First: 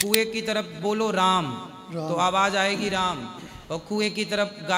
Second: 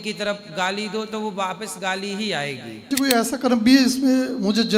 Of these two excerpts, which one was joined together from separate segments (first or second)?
second